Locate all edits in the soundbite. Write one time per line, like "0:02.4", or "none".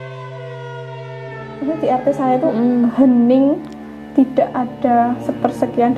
0:01.3